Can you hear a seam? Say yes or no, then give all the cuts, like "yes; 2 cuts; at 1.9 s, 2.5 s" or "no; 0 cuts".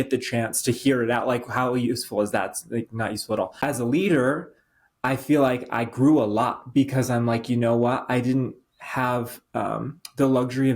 yes; 1 cut; at 3.6 s